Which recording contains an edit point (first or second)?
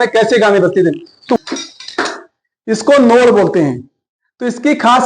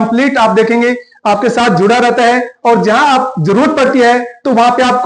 first